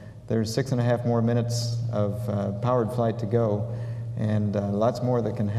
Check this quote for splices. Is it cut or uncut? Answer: cut